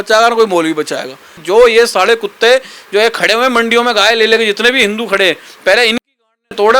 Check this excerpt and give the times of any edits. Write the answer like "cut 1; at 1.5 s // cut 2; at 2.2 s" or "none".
cut 1; at 1.3 s